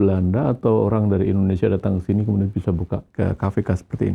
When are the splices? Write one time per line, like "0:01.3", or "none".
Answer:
0:03.1

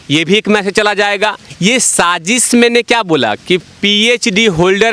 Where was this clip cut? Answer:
0:01.5

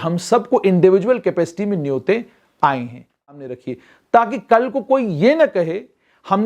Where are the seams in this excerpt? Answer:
0:03.6

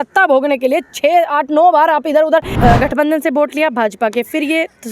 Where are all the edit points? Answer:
0:02.5

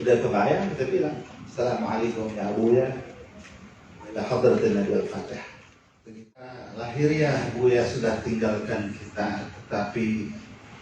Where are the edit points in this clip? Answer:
0:06.5

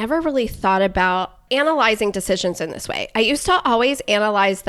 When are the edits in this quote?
0:01.4

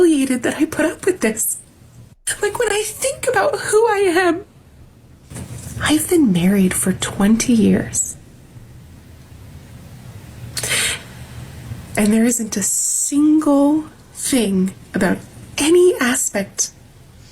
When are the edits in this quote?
0:04.6

